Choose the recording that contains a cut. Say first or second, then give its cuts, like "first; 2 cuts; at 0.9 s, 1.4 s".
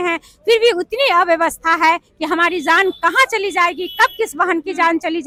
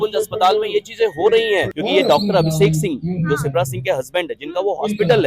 second; 1 cut; at 1.7 s